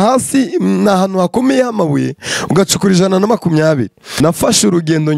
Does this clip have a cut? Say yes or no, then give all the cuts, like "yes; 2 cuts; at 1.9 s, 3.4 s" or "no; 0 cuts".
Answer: yes; 1 cut; at 4.0 s